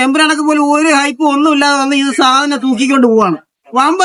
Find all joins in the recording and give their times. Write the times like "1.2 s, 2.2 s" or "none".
none